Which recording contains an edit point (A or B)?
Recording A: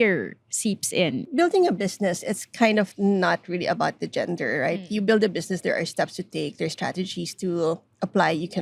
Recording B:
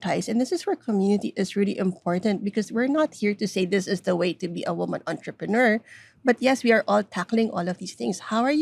A